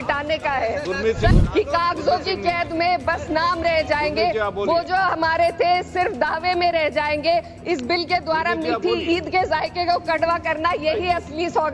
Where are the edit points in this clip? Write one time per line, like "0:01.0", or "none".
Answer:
0:01.3